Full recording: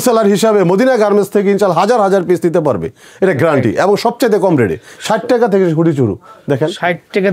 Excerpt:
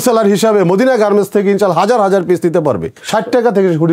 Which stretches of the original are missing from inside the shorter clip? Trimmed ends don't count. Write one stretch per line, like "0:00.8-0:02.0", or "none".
0:02.9-0:04.9